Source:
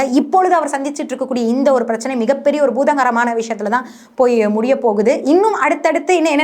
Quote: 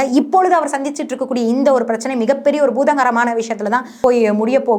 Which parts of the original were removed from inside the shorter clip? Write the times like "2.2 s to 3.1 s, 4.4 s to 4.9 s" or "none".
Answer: 3.9 s to 4.1 s